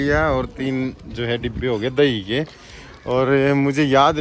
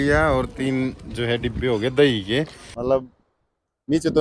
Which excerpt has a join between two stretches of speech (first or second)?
second